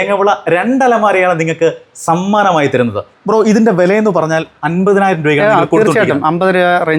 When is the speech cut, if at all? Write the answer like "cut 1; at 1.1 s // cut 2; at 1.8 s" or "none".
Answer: cut 1; at 3.1 s